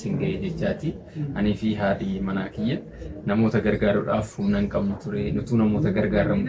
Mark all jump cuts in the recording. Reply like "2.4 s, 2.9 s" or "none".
none